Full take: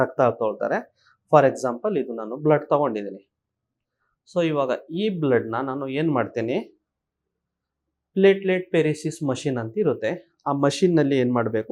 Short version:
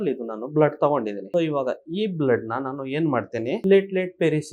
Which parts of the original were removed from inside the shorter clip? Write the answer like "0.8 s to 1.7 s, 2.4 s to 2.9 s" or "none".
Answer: 3.1 s to 4.2 s, 6.6 s to 8.1 s